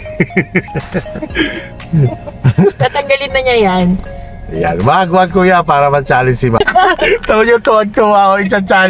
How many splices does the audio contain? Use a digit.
0